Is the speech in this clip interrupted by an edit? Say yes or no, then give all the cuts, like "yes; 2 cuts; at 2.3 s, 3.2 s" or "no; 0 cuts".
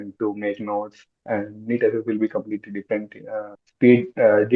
yes; 1 cut; at 3.6 s